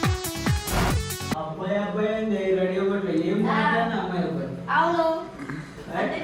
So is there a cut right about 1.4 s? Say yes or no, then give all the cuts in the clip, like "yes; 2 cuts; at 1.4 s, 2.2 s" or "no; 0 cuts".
yes; 1 cut; at 1.4 s